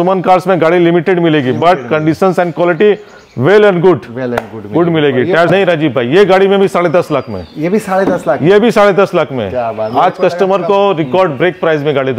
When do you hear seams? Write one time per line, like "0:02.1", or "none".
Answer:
0:05.5